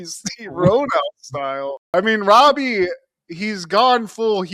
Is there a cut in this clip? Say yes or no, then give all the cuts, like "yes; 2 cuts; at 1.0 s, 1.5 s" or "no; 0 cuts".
no; 0 cuts